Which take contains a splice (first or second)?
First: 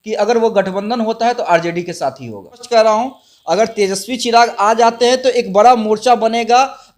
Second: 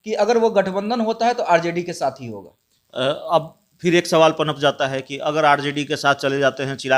first